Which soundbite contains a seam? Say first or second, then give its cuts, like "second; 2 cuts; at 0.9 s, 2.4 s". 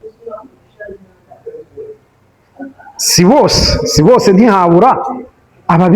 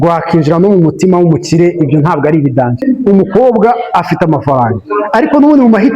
second; 1 cut; at 2.8 s